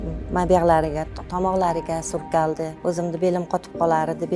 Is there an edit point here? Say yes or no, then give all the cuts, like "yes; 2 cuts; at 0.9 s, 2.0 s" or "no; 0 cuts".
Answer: yes; 1 cut; at 2.7 s